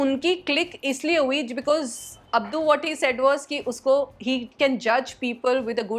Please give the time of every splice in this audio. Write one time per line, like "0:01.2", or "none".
none